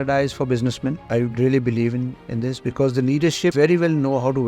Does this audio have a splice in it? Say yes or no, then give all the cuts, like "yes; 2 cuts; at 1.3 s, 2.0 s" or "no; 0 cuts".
yes; 2 cuts; at 1.0 s, 3.5 s